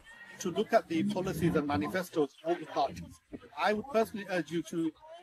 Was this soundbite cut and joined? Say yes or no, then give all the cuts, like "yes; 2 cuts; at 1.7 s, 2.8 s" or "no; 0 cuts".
no; 0 cuts